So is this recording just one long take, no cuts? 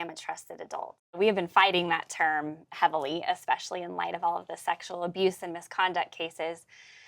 no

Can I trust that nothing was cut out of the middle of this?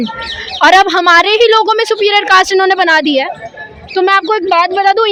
yes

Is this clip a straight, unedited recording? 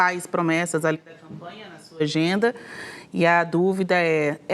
yes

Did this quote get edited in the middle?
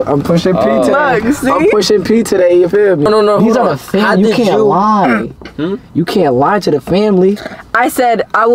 yes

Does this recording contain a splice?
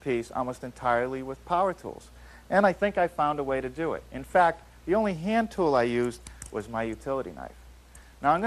yes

